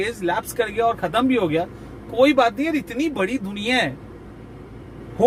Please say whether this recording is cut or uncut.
uncut